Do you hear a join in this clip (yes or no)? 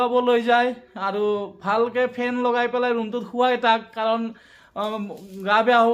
no